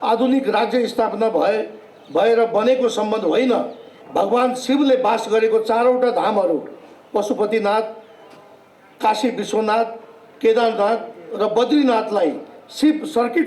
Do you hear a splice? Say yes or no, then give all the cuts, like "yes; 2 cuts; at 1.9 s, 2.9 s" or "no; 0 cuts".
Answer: yes; 1 cut; at 3.9 s